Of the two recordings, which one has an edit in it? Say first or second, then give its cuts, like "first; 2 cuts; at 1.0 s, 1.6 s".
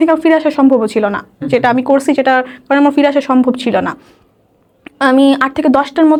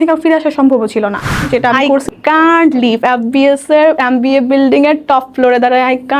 second; 1 cut; at 2.0 s